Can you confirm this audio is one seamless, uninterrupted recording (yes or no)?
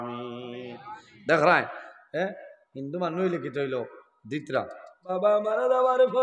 no